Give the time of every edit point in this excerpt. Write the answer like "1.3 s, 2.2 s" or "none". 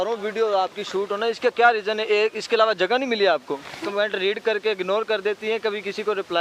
3.8 s